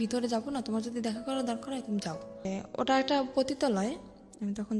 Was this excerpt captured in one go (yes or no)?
no